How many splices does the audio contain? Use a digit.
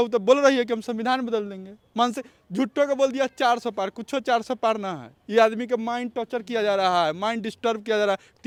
0